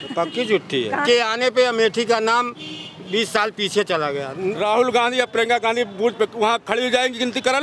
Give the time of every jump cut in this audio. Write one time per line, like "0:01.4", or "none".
0:01.0
0:04.6